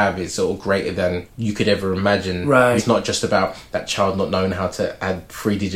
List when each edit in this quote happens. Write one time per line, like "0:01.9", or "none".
0:01.3
0:02.8